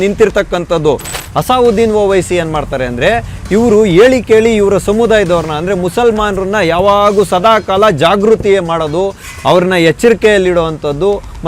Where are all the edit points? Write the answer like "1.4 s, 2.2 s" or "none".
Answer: 1.1 s